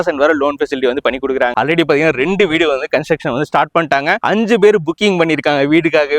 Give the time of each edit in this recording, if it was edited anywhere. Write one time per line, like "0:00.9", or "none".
0:01.5